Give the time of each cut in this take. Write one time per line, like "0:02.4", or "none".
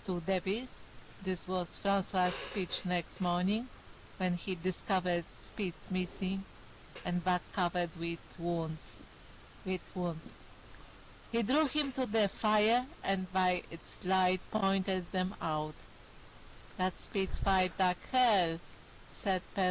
none